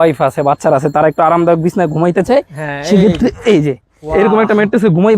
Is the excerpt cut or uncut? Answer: uncut